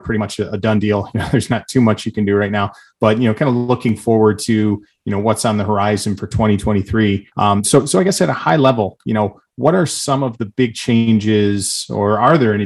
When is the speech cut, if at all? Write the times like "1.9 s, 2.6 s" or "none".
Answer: none